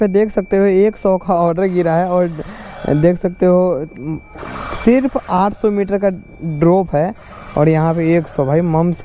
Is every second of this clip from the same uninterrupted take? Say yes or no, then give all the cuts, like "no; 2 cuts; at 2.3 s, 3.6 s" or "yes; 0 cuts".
yes; 0 cuts